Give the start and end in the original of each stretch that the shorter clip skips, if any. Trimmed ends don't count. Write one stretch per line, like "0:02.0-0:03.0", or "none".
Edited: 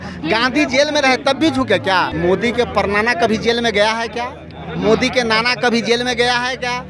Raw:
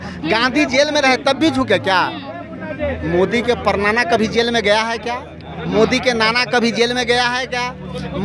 0:02.1-0:03.0